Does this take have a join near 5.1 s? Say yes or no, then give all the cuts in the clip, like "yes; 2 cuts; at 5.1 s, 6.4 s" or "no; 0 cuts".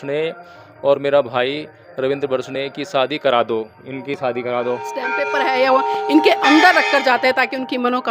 yes; 1 cut; at 5.1 s